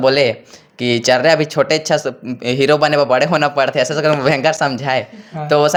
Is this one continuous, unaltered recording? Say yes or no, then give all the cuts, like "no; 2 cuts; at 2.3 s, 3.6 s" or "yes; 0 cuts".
yes; 0 cuts